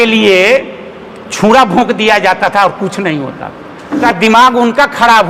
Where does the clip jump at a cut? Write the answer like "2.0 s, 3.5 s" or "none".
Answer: 4.0 s